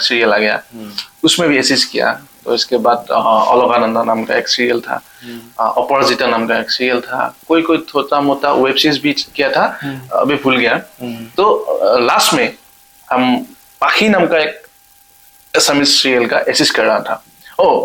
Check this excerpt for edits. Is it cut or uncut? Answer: uncut